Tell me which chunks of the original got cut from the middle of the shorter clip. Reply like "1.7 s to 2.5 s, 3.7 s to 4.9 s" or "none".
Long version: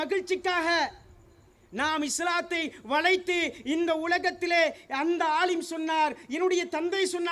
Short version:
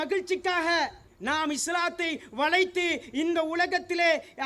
1.1 s to 1.6 s